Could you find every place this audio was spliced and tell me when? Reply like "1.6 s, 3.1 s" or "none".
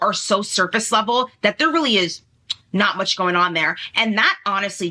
none